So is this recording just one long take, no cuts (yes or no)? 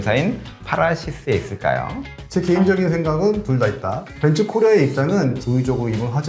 yes